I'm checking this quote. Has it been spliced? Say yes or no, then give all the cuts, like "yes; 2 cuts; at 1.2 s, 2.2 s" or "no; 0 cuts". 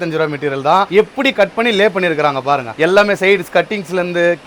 no; 0 cuts